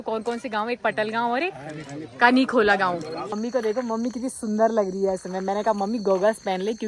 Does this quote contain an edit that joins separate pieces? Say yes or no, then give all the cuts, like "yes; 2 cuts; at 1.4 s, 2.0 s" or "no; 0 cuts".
yes; 1 cut; at 3.4 s